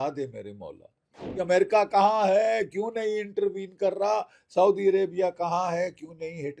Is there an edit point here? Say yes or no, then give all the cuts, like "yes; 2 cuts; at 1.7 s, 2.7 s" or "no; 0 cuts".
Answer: yes; 1 cut; at 1.3 s